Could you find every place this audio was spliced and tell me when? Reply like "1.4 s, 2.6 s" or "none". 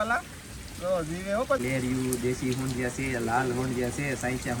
1.6 s

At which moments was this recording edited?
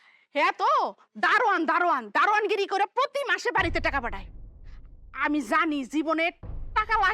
none

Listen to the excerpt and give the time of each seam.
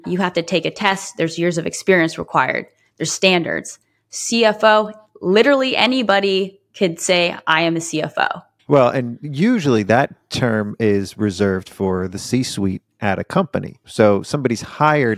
13.8 s

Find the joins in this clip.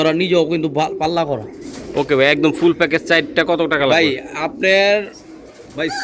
none

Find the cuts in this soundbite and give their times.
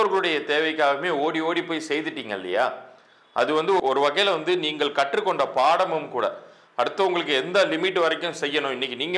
none

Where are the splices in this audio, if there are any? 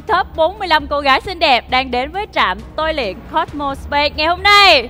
none

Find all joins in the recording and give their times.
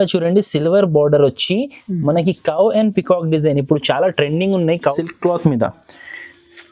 4.9 s

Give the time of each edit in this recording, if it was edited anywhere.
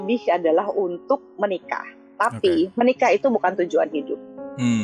none

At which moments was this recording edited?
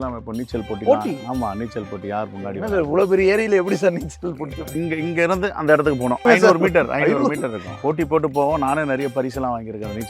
4.7 s, 6.2 s, 7.7 s

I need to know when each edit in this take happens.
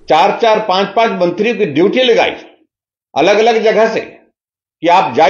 none

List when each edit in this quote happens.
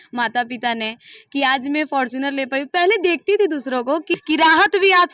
4.1 s

